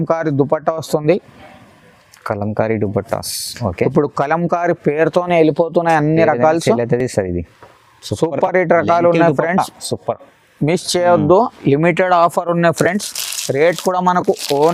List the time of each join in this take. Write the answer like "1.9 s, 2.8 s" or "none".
none